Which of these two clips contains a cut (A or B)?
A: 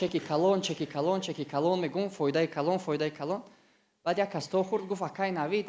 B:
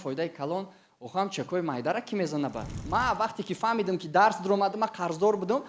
B